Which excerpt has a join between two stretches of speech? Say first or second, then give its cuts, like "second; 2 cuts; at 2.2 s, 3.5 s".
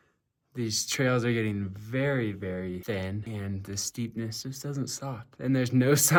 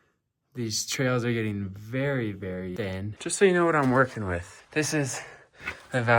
second; 1 cut; at 2.8 s